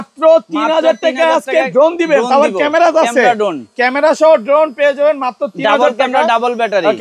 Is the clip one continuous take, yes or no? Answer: yes